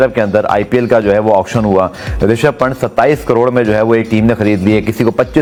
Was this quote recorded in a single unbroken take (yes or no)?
yes